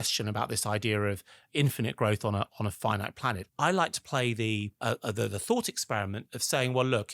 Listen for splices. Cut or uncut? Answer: cut